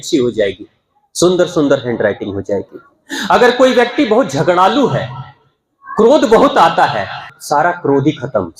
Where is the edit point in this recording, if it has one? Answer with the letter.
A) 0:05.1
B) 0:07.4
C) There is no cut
B